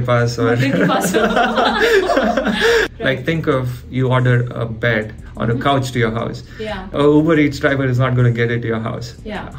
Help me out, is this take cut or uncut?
cut